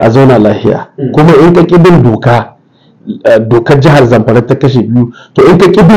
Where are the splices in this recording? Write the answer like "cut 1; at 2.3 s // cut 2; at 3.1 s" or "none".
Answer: cut 1; at 2.9 s